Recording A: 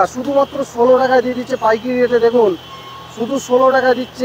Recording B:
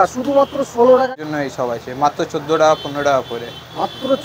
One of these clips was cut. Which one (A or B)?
B